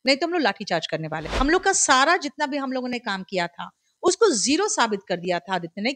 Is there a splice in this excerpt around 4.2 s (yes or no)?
no